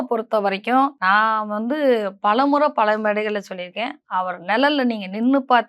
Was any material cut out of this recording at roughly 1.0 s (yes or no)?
yes